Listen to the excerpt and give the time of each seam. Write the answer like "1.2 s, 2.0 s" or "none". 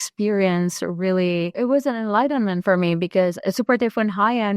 1.6 s, 3.4 s

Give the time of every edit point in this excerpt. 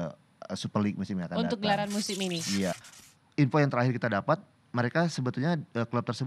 2.7 s

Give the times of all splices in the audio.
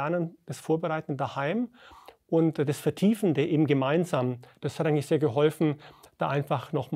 4.6 s

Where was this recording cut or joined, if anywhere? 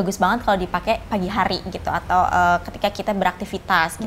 1.0 s

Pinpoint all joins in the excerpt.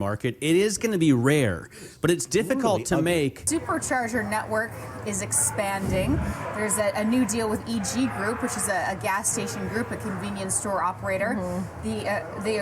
3.4 s

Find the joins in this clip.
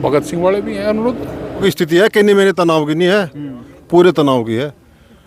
1.6 s

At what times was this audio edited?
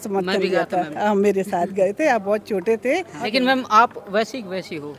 3.2 s

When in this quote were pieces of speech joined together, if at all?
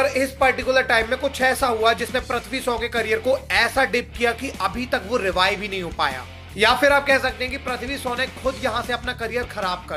none

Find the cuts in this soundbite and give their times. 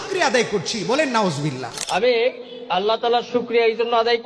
1.7 s

